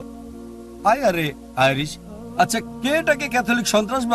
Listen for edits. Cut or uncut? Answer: cut